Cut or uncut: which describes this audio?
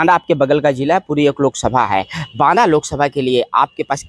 uncut